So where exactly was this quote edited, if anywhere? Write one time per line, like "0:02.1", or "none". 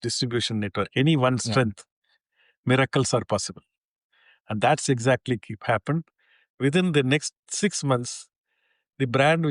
0:07.4